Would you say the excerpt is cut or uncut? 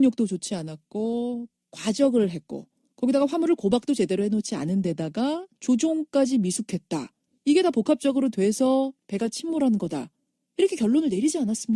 uncut